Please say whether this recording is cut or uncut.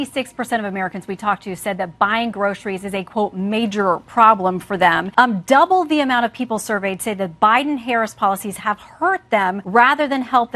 cut